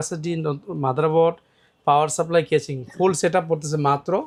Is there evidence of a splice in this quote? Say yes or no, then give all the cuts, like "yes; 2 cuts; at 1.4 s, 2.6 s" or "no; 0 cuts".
no; 0 cuts